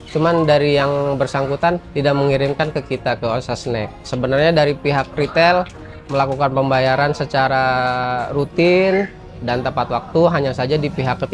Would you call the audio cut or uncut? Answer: cut